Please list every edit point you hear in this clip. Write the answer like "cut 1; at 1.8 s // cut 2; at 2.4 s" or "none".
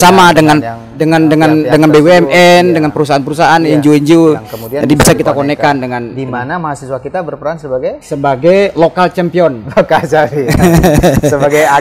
none